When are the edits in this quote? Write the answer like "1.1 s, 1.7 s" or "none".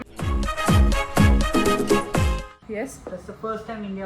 2.5 s